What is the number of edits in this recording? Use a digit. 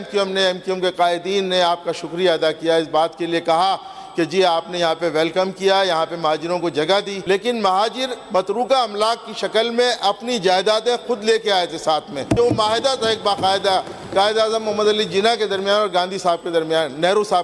2